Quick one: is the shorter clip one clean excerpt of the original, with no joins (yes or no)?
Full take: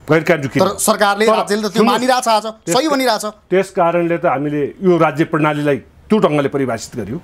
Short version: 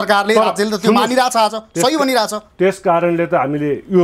yes